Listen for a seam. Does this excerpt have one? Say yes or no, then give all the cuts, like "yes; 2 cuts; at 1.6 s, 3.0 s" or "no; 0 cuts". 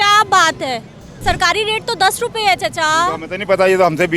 yes; 1 cut; at 1.1 s